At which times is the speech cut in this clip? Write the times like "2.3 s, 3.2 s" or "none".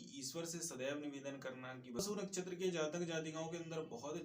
2.0 s